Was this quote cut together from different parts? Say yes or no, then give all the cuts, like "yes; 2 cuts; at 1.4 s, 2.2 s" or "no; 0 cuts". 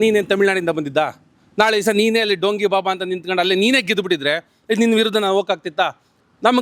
no; 0 cuts